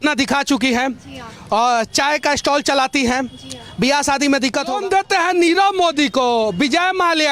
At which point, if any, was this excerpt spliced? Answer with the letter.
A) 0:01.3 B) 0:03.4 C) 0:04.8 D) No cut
C